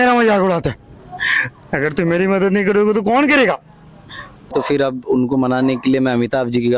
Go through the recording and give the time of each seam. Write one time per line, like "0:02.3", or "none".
0:04.5